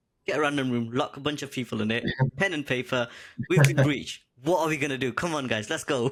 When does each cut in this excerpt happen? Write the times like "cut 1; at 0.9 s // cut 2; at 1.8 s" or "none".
none